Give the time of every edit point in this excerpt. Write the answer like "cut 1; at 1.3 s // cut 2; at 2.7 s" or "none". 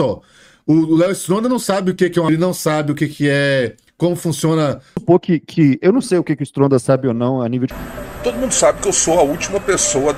cut 1; at 2.3 s // cut 2; at 5.0 s // cut 3; at 7.7 s